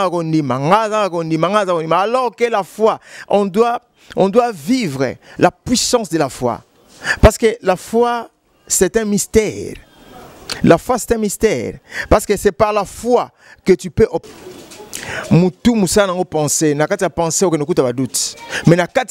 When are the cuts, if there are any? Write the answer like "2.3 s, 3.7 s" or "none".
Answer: 14.2 s